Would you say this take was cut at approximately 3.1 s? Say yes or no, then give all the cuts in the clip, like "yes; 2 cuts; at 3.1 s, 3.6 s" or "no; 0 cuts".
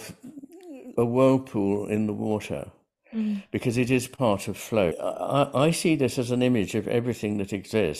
no; 2 cuts; at 0.9 s, 5.0 s